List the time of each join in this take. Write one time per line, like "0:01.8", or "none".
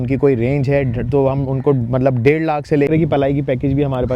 0:02.9